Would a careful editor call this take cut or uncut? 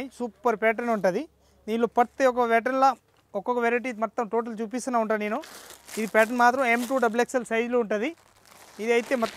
uncut